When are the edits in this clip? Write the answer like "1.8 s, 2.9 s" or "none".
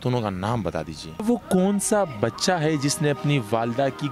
1.2 s